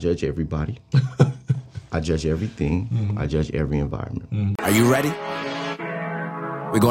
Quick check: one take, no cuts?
no; 1 cut; at 4.6 s

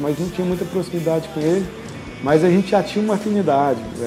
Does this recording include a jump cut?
no; 0 cuts

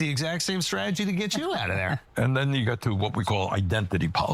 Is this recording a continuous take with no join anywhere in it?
no; 1 cut; at 2.0 s

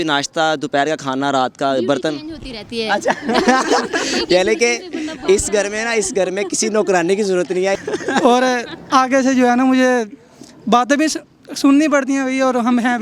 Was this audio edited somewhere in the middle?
yes; 1 cut; at 7.7 s

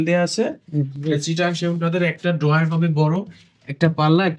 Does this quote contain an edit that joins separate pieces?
no; 0 cuts

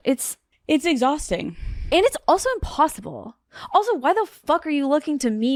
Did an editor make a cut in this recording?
no; 0 cuts

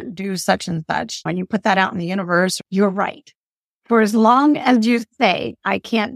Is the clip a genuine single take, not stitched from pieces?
no; 2 cuts; at 1.3 s, 2.6 s

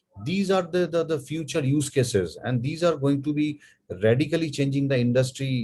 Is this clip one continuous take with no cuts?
yes; 0 cuts

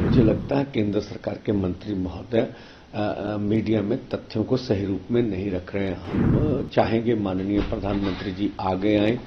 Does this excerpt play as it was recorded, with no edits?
yes; 0 cuts

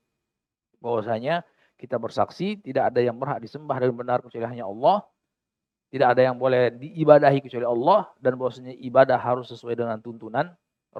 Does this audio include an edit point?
no; 0 cuts

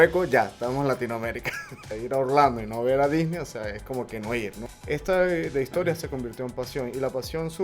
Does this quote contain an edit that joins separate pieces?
yes; 2 cuts; at 1.8 s, 4.6 s

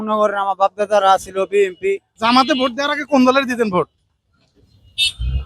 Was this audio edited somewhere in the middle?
yes; 1 cut; at 2.1 s

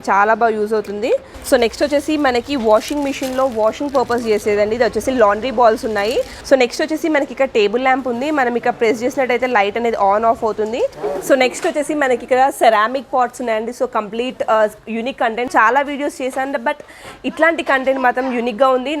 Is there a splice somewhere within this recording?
yes; 4 cuts; at 1.3 s, 6.4 s, 11.0 s, 15.5 s

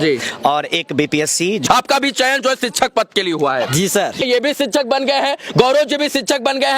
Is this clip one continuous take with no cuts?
no; 2 cuts; at 1.6 s, 4.2 s

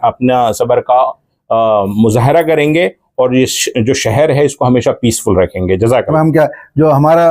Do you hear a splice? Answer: yes; 1 cut; at 6.1 s

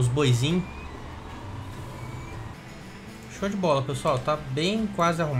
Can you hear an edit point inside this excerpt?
yes; 1 cut; at 2.5 s

